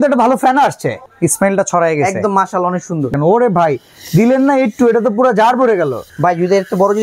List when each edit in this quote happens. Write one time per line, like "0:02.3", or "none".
0:01.1
0:03.1
0:06.0